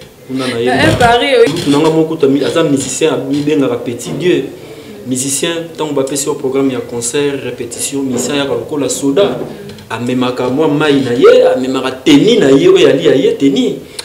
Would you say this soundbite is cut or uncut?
cut